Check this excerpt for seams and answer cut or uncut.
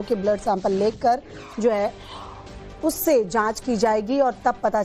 uncut